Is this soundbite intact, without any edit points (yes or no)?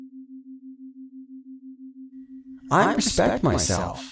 no